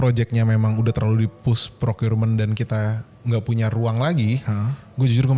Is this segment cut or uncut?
uncut